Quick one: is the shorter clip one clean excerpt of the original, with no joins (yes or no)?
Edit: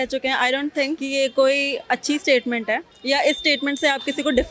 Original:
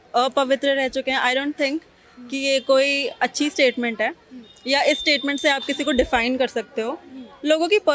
no